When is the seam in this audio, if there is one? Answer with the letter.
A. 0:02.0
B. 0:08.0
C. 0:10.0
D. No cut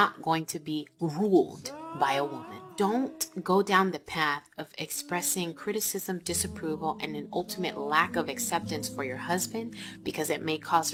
D